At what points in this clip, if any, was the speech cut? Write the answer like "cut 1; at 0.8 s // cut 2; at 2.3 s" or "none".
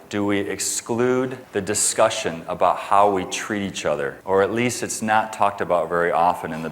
cut 1; at 1.4 s // cut 2; at 4.2 s